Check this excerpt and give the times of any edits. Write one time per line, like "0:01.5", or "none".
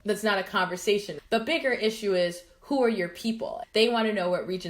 0:01.1
0:03.6